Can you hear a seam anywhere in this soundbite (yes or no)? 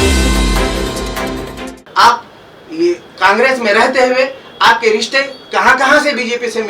yes